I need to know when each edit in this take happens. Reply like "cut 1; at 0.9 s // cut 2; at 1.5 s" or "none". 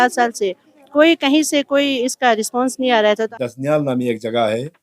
cut 1; at 3.2 s